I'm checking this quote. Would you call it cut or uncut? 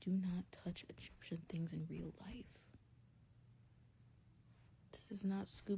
uncut